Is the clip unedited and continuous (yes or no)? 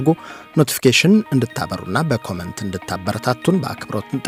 yes